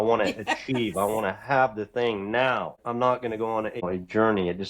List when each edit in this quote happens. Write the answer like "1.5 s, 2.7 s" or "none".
2.8 s, 3.8 s